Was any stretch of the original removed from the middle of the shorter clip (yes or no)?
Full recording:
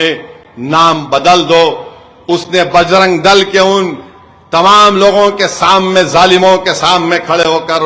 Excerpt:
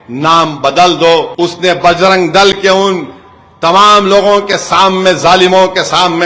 yes